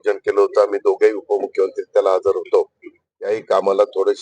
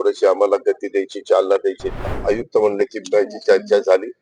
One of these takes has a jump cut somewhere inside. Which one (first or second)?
second